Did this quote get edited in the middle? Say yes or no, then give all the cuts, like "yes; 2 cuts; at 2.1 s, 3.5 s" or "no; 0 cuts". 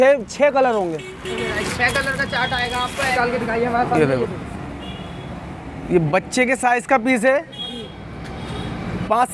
yes; 1 cut; at 3.1 s